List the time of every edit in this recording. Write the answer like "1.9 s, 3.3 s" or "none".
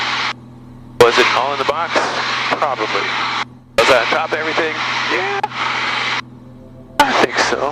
3.5 s